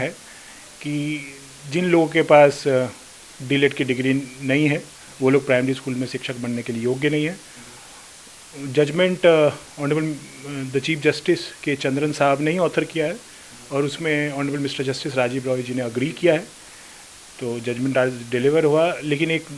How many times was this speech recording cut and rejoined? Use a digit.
0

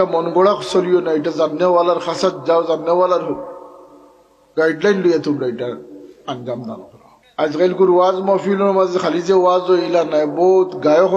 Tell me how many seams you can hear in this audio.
1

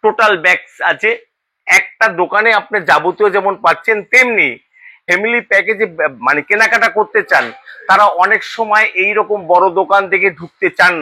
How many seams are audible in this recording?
1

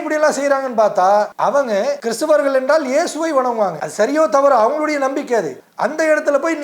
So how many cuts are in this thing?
3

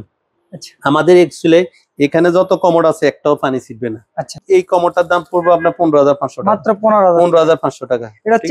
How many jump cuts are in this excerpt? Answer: 1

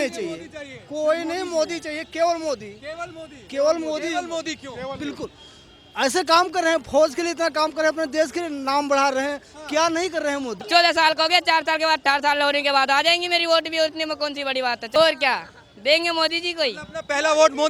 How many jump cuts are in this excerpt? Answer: 2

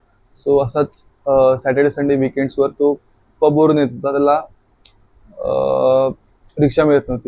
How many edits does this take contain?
0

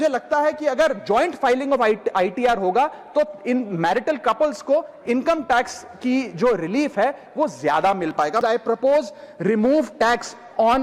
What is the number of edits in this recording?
1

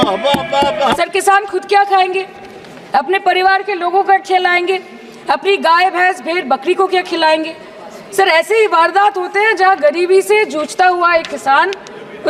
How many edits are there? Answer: 0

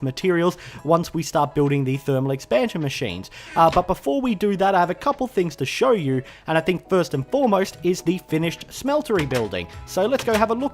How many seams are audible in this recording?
1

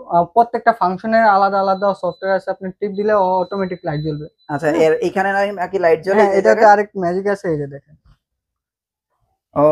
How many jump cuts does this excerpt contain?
0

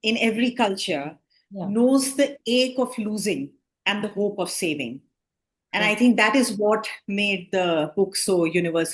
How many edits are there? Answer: 0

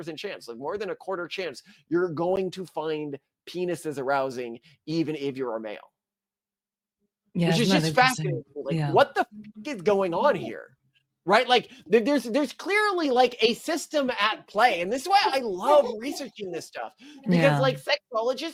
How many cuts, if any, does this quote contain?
0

